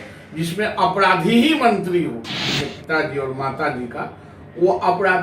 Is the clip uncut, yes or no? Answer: no